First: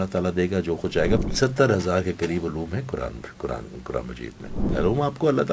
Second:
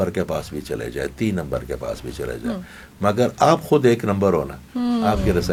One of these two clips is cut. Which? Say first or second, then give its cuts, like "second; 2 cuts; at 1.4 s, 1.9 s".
first; 2 cuts; at 1.2 s, 4.6 s